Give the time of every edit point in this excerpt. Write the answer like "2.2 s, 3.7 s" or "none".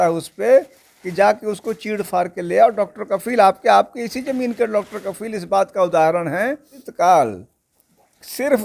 6.8 s